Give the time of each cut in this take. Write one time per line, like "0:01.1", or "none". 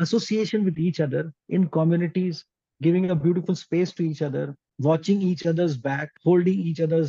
0:04.6
0:06.1